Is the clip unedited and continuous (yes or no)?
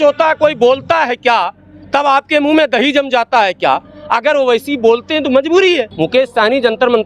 no